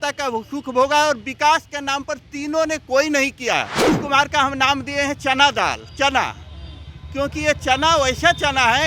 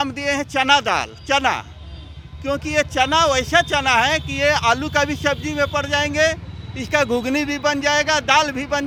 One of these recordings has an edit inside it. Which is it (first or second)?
first